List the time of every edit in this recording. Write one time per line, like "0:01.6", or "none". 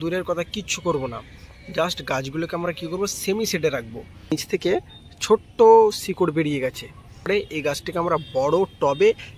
0:04.3
0:07.3